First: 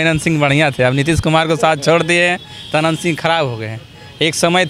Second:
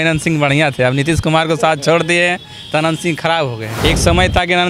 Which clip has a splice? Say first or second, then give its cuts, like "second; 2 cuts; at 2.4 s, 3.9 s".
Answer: second; 1 cut; at 3.7 s